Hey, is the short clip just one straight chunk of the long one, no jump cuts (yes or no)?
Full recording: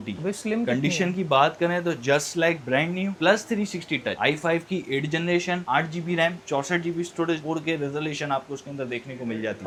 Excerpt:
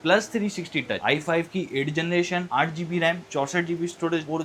yes